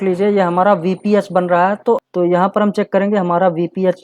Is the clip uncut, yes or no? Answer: no